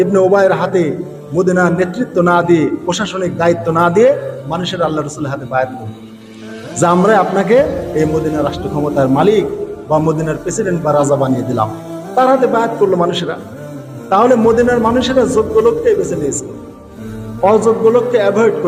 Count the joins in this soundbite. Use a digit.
0